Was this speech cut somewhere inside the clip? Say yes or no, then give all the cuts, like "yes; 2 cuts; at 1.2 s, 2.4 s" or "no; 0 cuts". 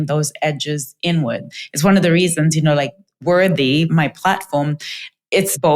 yes; 1 cut; at 1.5 s